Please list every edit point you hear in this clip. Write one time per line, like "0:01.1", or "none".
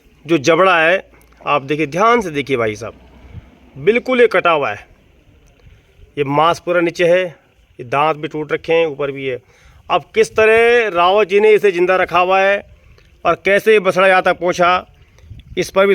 none